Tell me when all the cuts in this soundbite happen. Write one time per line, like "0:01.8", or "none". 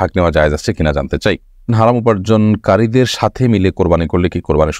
0:01.7